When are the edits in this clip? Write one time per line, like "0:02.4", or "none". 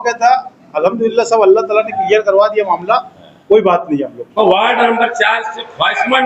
0:04.2

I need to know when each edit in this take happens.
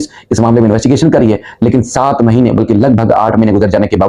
none

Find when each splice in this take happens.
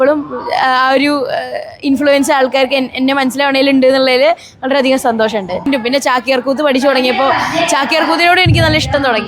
0:05.7

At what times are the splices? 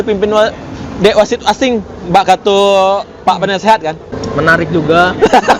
0:04.1

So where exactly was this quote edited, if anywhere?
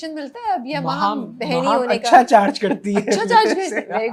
none

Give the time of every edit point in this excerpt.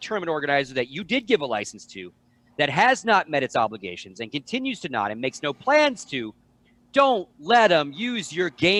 none

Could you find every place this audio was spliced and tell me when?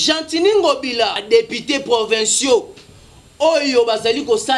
0:01.2

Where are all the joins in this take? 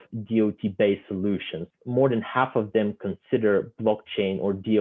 0:01.6

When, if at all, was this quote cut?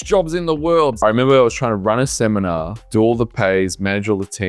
0:01.0
0:02.8

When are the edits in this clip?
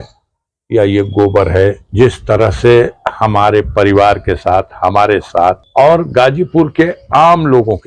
0:01.8
0:05.6

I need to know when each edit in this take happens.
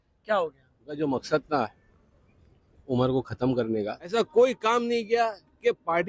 0:01.0
0:04.1

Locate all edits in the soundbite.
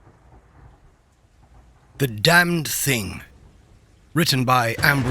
0:01.4

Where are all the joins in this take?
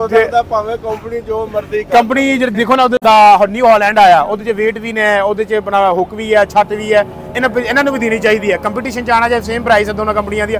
0:03.0

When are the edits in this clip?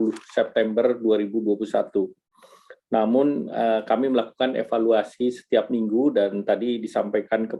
none

